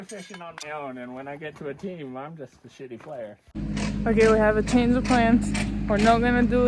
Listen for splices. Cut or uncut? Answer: cut